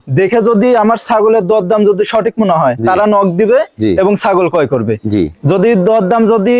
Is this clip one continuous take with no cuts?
yes; 0 cuts

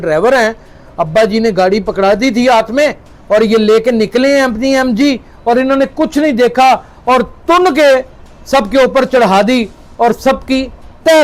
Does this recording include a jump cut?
no; 0 cuts

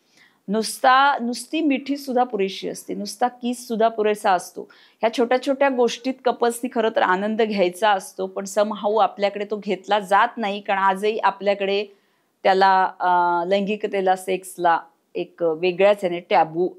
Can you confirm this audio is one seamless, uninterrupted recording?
yes; 0 cuts

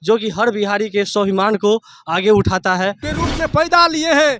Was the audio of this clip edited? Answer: yes; 1 cut; at 3.0 s

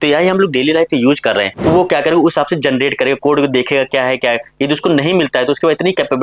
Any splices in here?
yes; 1 cut; at 1.7 s

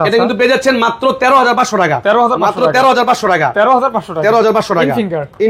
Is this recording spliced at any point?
no; 0 cuts

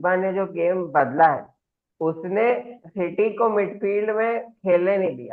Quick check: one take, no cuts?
yes; 0 cuts

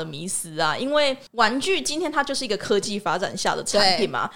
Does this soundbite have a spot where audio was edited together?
yes; 1 cut; at 1.2 s

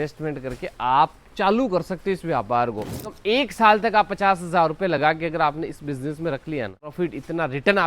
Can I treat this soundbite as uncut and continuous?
no; 2 cuts; at 3.1 s, 6.9 s

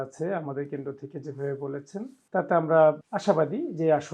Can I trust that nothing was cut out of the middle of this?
no; 2 cuts; at 2.2 s, 3.1 s

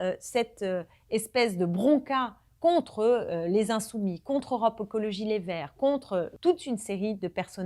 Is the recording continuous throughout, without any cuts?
no; 1 cut; at 6.3 s

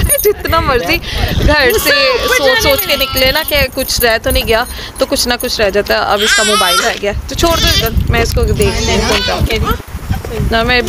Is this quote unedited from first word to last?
yes; 0 cuts

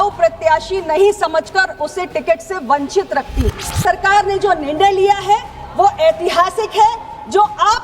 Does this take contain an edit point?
yes; 1 cut; at 3.8 s

